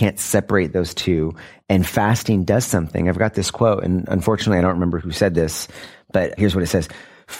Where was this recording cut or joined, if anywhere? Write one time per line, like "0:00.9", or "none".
0:05.0
0:06.4